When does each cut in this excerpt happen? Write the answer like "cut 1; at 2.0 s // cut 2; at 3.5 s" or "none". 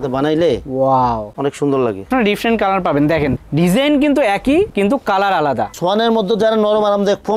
cut 1; at 2.1 s // cut 2; at 5.7 s